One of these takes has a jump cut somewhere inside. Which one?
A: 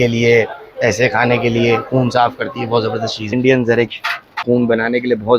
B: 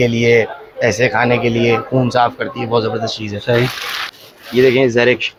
A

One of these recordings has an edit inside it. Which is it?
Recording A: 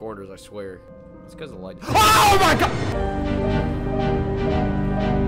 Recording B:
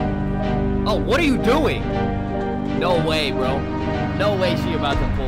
A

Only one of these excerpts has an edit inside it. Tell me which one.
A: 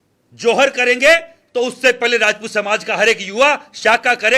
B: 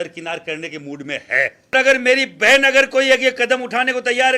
B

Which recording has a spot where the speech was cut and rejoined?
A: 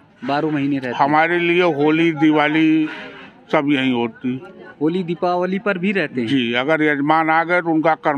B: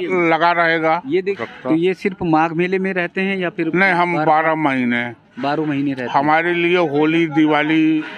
B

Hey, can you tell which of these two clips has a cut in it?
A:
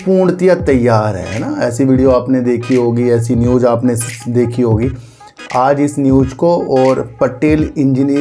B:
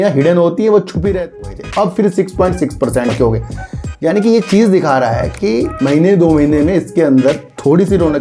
B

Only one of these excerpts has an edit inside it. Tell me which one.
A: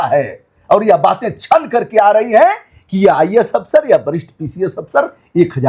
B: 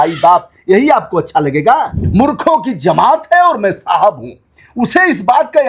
B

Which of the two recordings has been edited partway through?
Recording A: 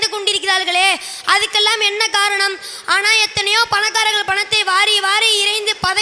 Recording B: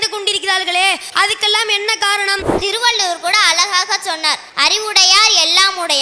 B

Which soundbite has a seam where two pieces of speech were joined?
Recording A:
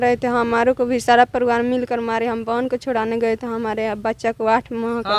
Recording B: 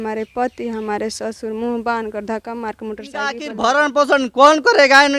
B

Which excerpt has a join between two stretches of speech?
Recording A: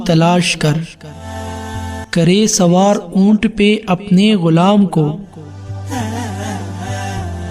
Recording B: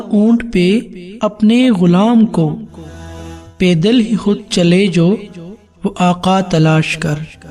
A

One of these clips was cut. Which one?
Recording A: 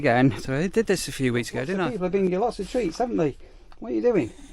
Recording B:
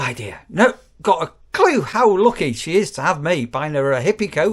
A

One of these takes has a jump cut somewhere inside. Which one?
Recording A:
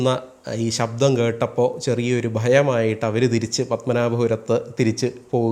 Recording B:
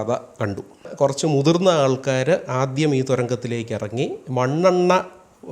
B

